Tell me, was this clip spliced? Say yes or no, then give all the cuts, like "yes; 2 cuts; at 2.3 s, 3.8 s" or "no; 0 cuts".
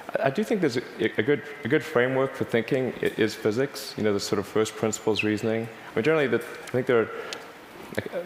no; 0 cuts